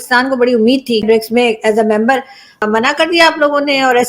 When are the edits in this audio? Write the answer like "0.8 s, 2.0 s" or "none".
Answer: 1.0 s, 2.6 s